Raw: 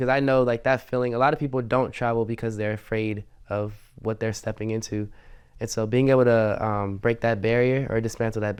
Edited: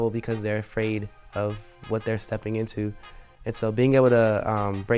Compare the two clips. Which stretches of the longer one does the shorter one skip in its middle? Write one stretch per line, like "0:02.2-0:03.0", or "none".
none